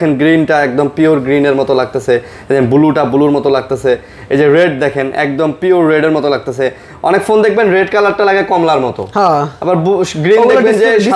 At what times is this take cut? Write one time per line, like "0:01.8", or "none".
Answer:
none